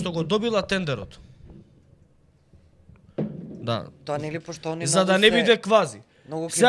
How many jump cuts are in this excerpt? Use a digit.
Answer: 0